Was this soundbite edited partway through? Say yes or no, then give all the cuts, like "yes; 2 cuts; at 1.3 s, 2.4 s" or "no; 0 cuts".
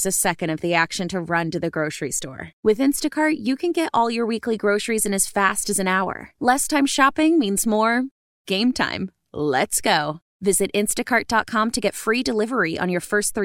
no; 0 cuts